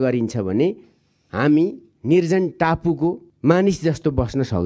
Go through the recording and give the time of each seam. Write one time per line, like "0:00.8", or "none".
0:03.3